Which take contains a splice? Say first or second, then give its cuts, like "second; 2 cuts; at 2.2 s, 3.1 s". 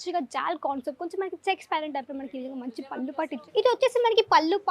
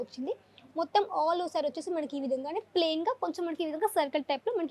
first; 1 cut; at 3.4 s